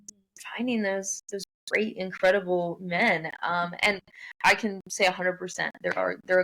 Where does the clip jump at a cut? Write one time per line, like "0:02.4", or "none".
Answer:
none